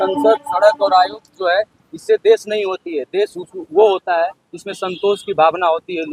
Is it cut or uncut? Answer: uncut